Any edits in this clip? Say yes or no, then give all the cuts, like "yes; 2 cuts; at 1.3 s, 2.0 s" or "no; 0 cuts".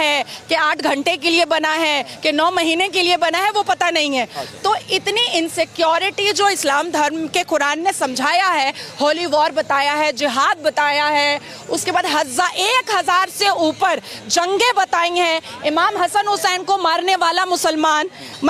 no; 0 cuts